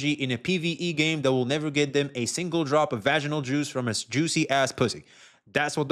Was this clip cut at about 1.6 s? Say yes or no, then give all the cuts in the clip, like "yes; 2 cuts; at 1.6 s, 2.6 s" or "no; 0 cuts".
no; 0 cuts